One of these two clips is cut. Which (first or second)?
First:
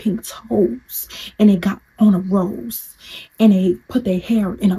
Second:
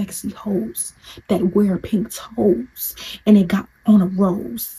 first